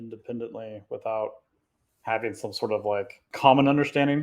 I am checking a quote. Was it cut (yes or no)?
yes